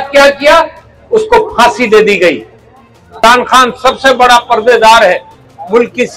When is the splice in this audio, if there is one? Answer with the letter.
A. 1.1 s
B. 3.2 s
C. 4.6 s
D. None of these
B